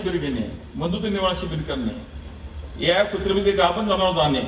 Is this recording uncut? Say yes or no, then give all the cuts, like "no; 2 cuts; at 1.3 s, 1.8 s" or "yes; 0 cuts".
yes; 0 cuts